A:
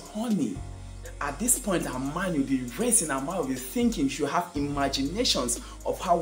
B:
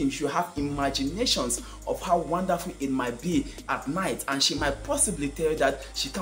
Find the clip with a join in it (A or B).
A